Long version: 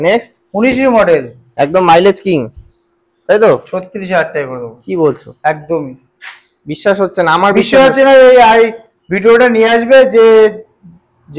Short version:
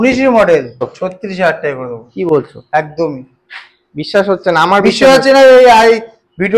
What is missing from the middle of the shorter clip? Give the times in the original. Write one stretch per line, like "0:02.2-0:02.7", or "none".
0:01.5-0:03.6